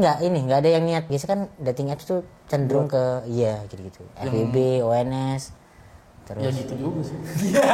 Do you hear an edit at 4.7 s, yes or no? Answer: no